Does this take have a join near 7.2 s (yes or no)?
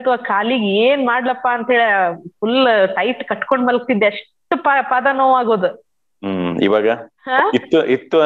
yes